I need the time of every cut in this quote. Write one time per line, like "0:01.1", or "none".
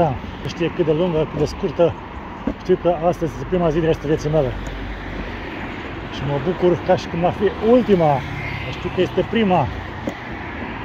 none